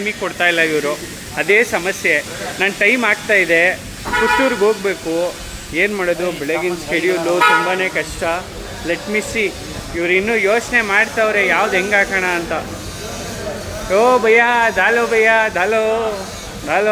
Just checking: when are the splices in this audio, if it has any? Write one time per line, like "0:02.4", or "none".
none